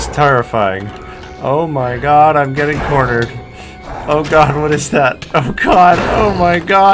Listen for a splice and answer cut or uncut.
uncut